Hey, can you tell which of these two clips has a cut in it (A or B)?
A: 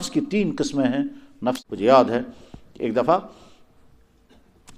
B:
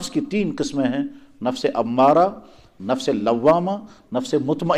A